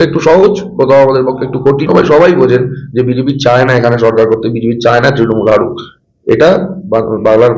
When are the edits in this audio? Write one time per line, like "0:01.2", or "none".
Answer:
0:01.9